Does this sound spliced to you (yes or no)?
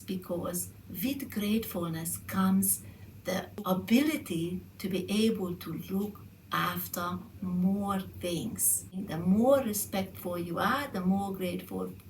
yes